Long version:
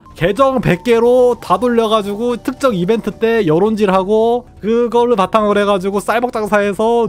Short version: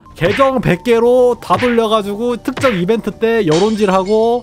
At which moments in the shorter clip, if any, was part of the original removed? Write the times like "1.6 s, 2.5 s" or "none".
none